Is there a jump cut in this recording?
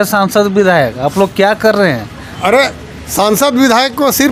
no; 0 cuts

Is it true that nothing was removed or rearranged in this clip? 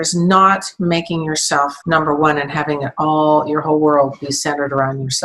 yes; 0 cuts

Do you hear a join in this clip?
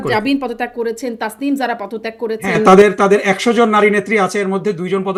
no; 0 cuts

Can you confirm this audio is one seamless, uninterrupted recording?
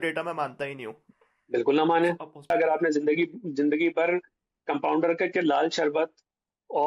no; 2 cuts; at 1.0 s, 2.5 s

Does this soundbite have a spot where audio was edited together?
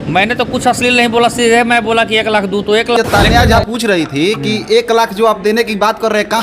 yes; 1 cut; at 3.0 s

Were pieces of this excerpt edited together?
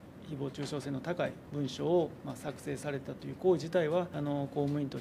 yes; 2 cuts; at 1.4 s, 4.1 s

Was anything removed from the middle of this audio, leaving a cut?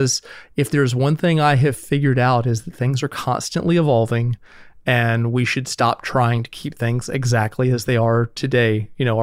no; 0 cuts

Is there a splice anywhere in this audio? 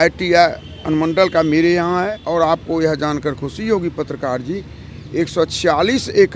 yes; 1 cut; at 2.2 s

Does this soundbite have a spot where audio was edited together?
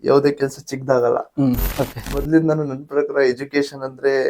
yes; 1 cut; at 1.7 s

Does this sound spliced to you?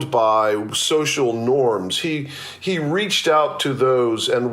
no; 0 cuts

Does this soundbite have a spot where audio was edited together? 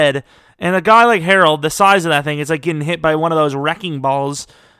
no; 0 cuts

